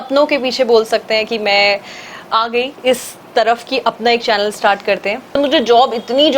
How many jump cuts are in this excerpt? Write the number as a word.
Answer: one